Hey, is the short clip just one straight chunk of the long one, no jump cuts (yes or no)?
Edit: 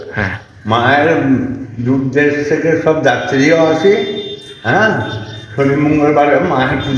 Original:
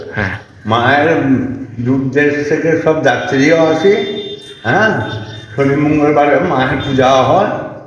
yes